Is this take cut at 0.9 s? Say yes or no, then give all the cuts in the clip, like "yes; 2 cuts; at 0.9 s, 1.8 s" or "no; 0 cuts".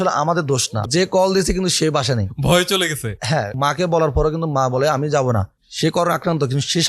yes; 3 cuts; at 0.9 s, 2.3 s, 3.5 s